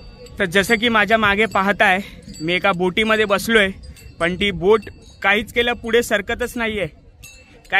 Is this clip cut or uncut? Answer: uncut